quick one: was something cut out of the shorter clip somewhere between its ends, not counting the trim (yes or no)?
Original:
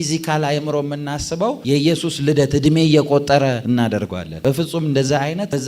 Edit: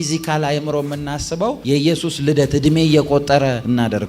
no